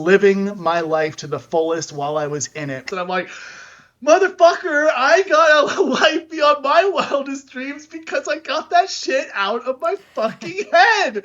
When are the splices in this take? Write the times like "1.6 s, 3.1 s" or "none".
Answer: 2.8 s

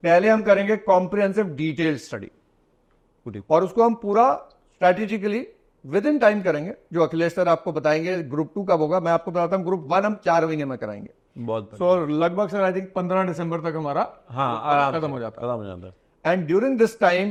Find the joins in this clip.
none

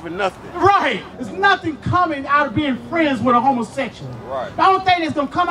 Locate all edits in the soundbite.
1.1 s

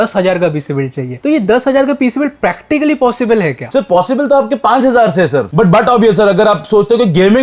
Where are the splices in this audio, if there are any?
5.5 s

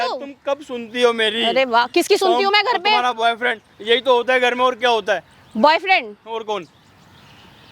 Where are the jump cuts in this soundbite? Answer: none

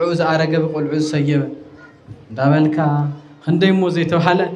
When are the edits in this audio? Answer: none

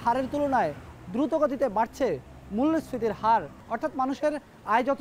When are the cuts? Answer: 3.7 s

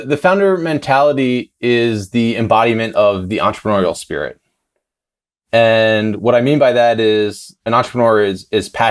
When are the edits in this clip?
7.6 s

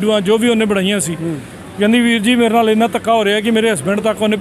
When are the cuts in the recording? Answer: none

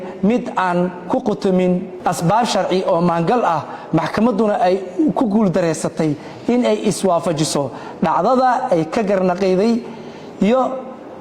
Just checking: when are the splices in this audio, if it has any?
1.9 s

